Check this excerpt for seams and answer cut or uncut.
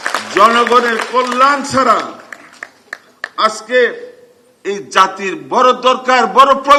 uncut